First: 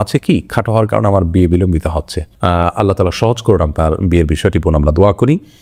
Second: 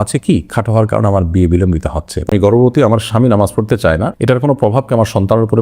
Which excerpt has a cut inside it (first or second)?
second